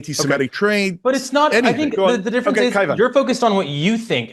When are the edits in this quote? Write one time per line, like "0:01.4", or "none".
0:02.0